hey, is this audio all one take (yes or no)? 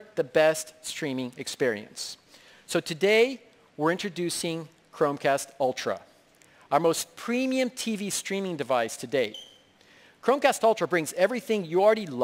no